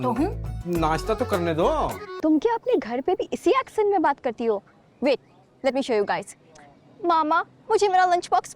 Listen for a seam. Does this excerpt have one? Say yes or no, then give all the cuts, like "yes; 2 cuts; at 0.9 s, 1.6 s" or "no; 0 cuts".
yes; 1 cut; at 2.0 s